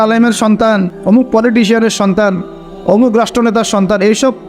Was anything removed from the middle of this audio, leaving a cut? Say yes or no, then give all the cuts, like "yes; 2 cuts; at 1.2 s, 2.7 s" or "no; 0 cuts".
yes; 1 cut; at 0.9 s